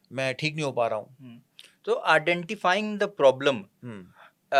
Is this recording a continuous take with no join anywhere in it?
yes; 0 cuts

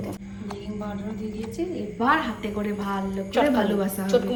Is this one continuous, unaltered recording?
yes; 0 cuts

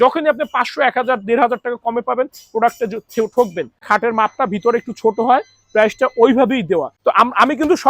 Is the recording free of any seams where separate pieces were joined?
no; 2 cuts; at 3.8 s, 6.9 s

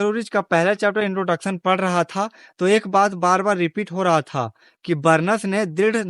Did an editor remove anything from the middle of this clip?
no; 0 cuts

